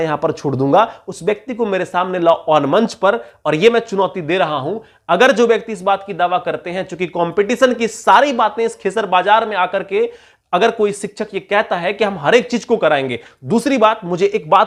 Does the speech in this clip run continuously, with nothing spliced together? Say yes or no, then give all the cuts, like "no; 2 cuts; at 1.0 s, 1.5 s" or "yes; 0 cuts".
yes; 0 cuts